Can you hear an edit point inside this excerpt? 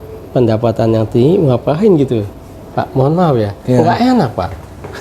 no; 0 cuts

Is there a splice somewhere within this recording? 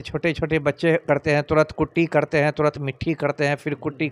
no; 0 cuts

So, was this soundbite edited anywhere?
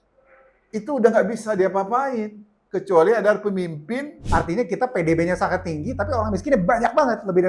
yes; 1 cut; at 4.2 s

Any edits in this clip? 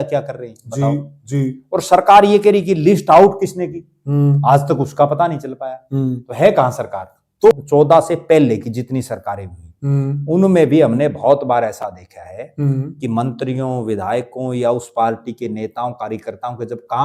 yes; 1 cut; at 7.5 s

